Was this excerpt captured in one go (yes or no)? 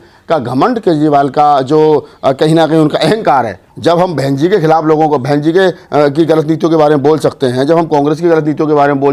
no